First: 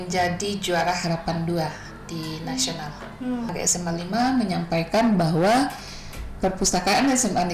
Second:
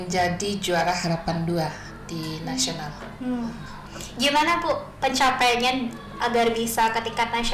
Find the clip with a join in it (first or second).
first